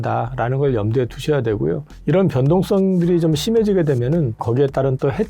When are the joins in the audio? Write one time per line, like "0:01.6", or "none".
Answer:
0:04.4